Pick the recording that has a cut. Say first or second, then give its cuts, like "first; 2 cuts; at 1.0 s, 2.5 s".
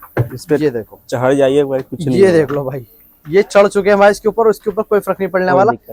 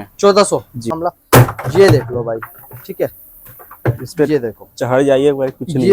second; 1 cut; at 0.9 s